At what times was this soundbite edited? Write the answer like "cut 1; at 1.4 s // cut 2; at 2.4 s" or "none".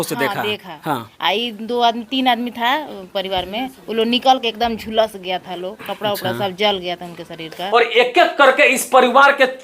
cut 1; at 7.5 s